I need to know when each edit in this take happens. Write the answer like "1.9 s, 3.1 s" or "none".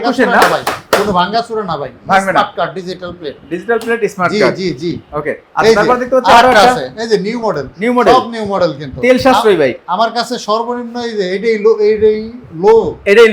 none